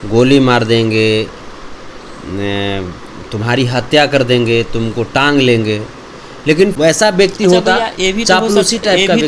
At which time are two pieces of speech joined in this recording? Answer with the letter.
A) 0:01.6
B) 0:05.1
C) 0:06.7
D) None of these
C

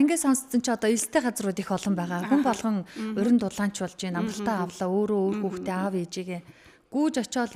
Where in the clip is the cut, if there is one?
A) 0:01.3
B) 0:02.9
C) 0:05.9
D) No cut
D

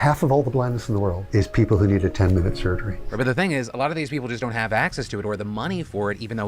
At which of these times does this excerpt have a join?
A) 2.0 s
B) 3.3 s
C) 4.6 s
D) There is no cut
B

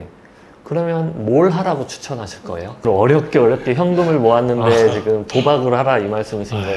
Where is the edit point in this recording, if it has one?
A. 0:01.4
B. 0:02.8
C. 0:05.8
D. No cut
B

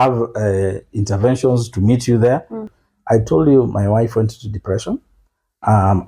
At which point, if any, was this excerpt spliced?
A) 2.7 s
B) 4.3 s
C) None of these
A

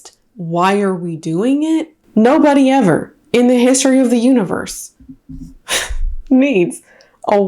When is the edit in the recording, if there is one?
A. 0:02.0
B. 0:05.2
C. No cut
A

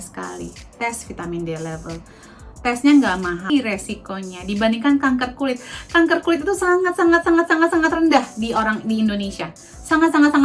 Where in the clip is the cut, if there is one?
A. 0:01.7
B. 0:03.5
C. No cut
B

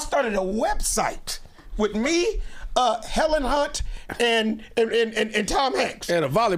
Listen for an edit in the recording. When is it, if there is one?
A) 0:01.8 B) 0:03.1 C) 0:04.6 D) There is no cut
D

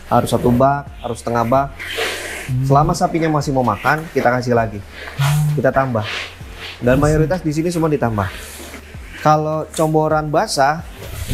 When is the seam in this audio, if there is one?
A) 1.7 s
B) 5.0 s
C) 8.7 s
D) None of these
C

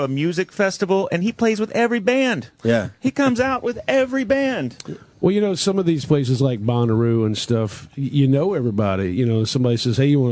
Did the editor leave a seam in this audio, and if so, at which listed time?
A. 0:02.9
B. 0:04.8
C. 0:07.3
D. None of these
C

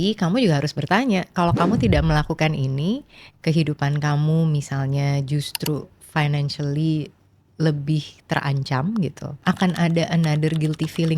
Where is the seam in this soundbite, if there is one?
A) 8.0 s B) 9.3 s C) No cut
B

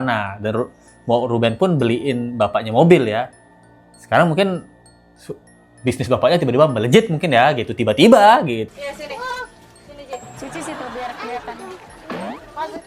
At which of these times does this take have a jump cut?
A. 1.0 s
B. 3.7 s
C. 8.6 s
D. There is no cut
C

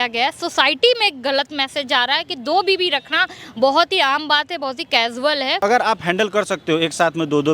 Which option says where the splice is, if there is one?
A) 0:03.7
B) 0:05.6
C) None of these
B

